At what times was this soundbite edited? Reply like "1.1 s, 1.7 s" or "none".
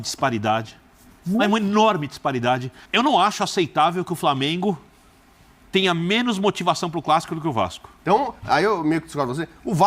2.8 s, 7.9 s